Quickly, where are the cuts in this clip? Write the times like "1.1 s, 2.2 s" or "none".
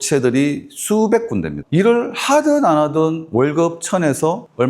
1.6 s